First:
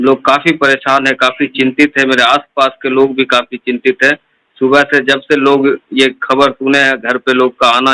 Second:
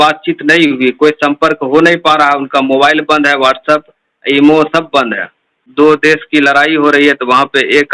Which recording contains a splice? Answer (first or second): second